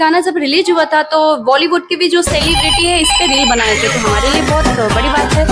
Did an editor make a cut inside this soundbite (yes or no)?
no